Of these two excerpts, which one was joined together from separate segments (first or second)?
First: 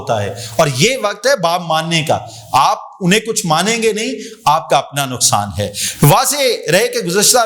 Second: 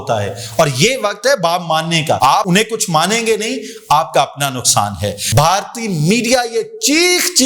second